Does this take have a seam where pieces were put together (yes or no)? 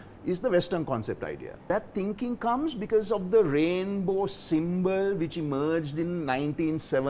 yes